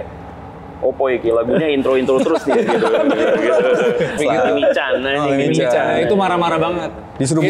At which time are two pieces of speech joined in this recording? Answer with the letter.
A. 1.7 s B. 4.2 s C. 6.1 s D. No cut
B